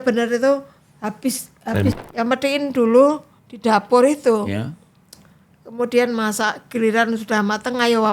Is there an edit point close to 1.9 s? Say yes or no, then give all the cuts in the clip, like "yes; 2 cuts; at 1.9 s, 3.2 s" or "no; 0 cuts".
yes; 1 cut; at 1.9 s